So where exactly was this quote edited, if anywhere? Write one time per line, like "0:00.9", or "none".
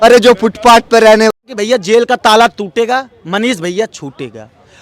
0:01.5